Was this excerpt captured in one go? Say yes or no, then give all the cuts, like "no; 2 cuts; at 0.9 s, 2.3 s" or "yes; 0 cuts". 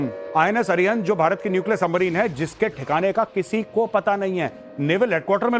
no; 1 cut; at 1.2 s